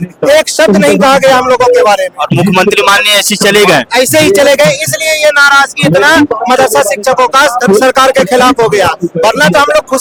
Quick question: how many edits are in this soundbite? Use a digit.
0